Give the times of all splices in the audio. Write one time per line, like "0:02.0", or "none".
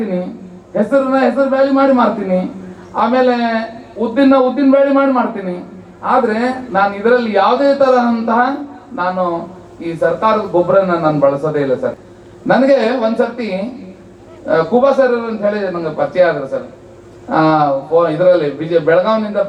0:12.0